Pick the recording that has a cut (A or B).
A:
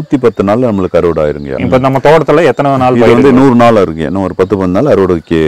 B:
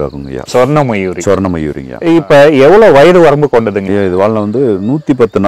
B